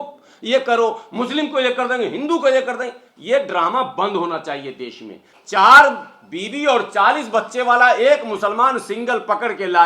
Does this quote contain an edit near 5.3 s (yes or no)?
yes